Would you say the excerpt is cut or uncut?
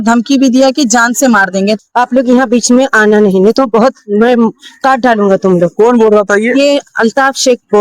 cut